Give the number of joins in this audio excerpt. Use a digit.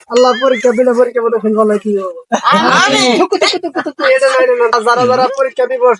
1